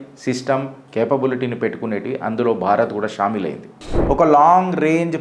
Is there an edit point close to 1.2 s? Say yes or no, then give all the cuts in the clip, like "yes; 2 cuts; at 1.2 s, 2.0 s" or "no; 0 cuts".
no; 1 cut; at 3.7 s